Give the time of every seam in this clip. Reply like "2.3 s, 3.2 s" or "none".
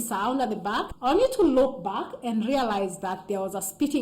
0.9 s